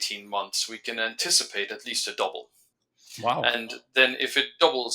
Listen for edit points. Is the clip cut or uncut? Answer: uncut